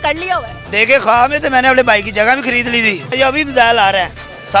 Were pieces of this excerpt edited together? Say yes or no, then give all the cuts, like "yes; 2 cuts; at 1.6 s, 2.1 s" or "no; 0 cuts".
yes; 1 cut; at 3.1 s